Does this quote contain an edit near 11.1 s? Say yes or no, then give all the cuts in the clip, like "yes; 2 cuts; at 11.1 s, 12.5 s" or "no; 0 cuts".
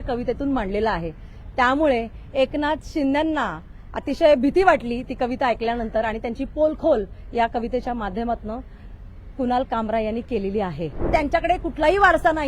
yes; 1 cut; at 11.1 s